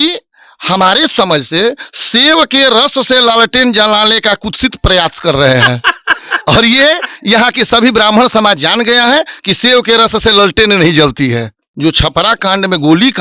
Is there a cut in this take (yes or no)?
yes